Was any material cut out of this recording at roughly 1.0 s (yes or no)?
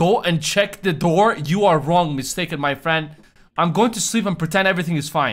no